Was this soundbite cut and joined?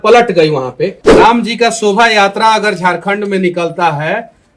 yes; 1 cut; at 1.0 s

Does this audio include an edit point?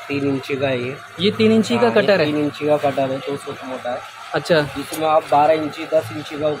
no; 0 cuts

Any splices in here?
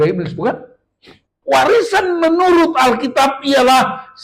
yes; 1 cut; at 1.3 s

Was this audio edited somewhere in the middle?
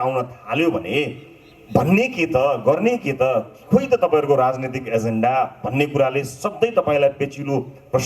no; 0 cuts

